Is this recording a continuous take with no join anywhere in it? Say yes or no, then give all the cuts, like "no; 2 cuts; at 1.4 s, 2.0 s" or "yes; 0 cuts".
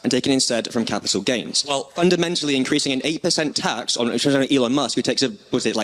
no; 1 cut; at 1.9 s